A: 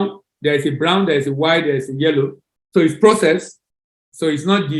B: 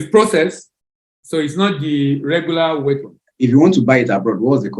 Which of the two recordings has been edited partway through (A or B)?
B